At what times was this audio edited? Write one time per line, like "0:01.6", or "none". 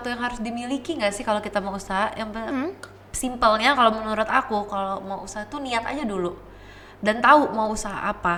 none